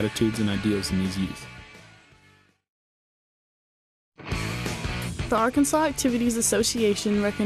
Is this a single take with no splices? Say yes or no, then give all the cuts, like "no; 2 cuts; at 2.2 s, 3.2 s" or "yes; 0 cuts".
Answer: yes; 0 cuts